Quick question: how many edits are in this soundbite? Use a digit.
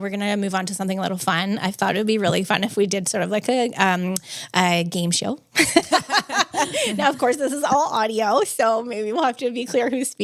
0